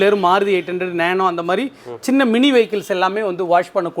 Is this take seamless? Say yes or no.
yes